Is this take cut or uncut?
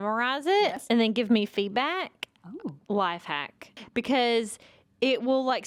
uncut